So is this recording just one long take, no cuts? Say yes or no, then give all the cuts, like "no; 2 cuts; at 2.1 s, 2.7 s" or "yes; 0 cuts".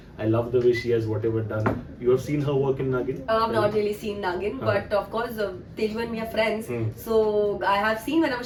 yes; 0 cuts